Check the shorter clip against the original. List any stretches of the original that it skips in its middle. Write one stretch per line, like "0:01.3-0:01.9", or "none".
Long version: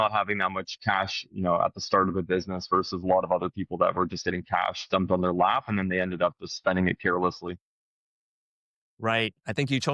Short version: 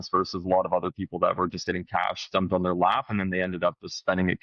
none